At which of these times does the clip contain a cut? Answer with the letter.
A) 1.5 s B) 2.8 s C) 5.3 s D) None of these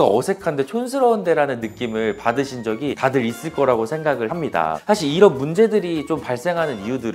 D